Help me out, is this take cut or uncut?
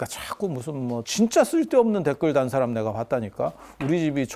cut